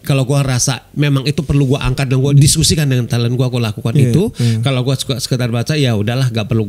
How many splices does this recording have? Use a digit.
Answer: 1